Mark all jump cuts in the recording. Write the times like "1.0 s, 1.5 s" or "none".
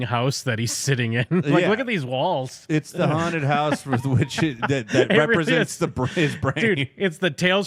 none